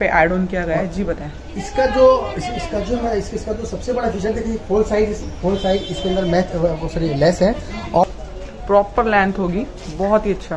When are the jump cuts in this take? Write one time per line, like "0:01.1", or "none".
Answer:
0:08.0

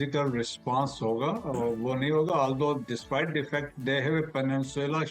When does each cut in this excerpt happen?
none

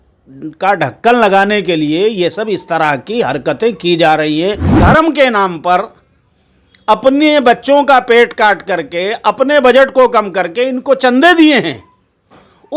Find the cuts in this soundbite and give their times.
0:04.7

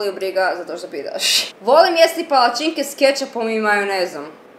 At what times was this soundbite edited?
0:01.3

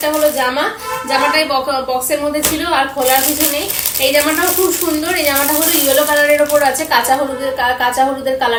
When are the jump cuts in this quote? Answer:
none

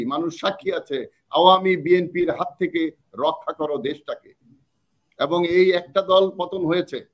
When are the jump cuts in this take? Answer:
none

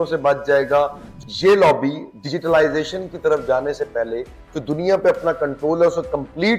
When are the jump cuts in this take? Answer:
0:01.0

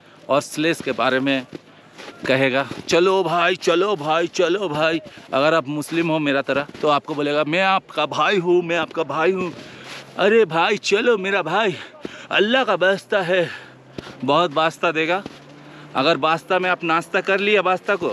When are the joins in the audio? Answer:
none

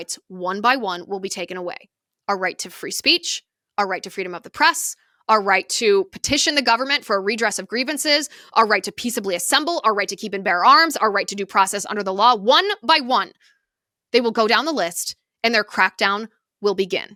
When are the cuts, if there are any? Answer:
none

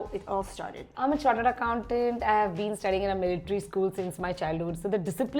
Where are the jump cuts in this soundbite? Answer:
0:00.9

